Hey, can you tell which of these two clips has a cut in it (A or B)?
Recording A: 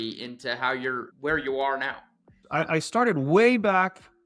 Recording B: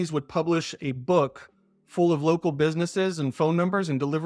A